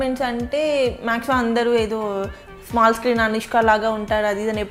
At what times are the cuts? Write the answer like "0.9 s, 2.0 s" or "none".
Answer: none